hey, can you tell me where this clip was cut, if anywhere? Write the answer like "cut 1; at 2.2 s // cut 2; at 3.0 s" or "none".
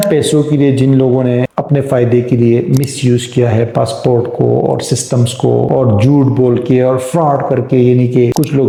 none